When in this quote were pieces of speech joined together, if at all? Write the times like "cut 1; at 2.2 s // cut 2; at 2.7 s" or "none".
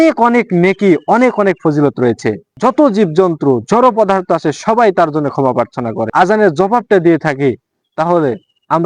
cut 1; at 2.5 s // cut 2; at 6.1 s